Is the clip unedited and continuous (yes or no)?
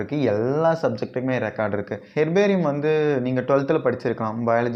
no